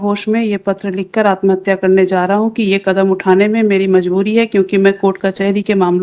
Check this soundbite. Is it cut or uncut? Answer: uncut